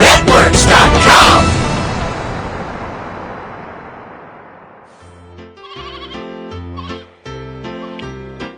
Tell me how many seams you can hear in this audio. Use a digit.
1